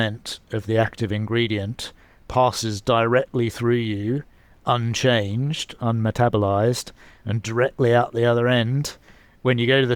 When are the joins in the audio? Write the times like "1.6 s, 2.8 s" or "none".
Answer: none